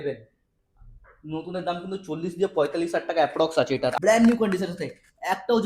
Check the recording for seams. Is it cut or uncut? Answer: cut